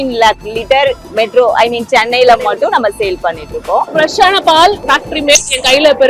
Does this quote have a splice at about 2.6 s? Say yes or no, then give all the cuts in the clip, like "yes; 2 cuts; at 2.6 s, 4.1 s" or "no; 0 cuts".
no; 3 cuts; at 1.0 s, 3.9 s, 4.8 s